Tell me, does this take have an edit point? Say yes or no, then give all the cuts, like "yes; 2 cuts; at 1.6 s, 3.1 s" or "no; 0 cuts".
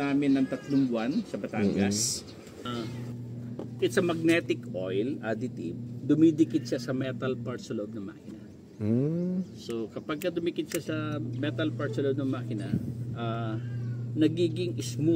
yes; 1 cut; at 2.7 s